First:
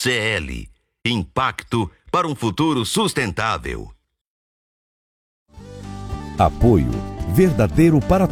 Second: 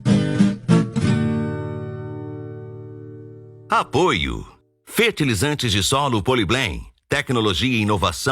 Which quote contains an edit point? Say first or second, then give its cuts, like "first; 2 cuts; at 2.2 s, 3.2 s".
second; 1 cut; at 3.5 s